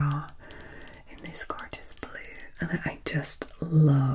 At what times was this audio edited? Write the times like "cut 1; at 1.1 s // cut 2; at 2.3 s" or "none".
none